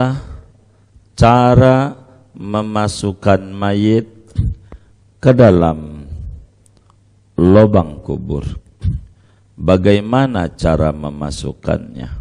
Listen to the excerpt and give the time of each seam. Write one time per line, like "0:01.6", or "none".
none